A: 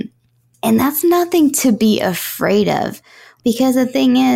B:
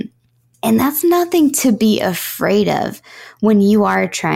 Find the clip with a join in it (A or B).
A